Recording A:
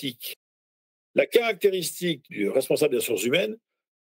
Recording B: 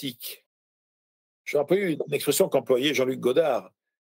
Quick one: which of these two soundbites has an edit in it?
B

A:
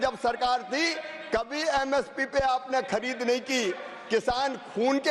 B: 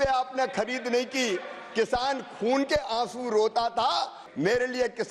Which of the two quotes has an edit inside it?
B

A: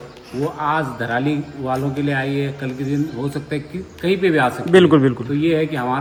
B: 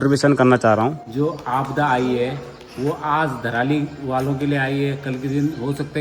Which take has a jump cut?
B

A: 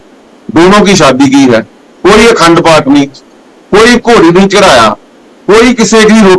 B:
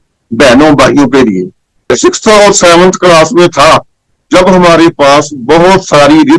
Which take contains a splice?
B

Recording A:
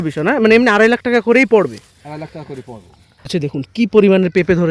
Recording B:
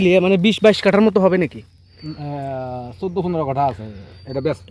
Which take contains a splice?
A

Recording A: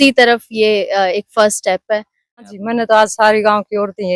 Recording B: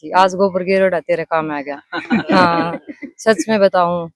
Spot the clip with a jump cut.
A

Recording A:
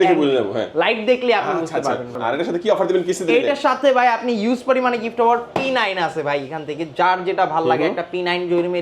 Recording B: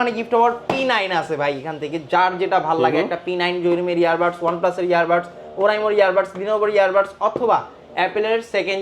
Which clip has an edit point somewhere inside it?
A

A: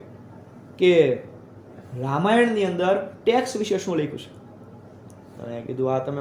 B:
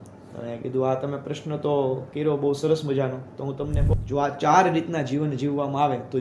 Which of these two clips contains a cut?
B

